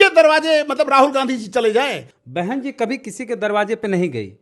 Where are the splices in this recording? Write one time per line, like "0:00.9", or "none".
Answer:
0:02.1